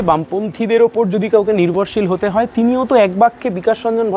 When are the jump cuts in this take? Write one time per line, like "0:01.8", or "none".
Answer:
none

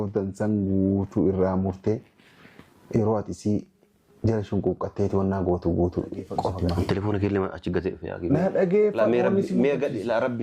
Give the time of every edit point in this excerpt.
0:06.5

